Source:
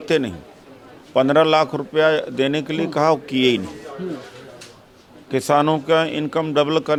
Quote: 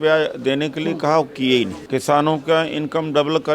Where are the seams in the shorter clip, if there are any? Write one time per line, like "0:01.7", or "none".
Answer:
0:01.8